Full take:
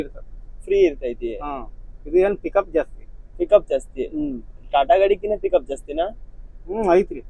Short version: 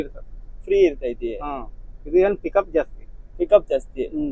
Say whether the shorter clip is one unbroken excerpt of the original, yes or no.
yes